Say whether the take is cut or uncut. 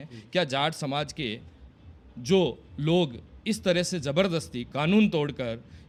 uncut